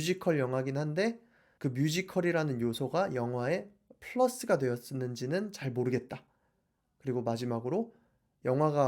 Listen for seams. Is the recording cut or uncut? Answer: uncut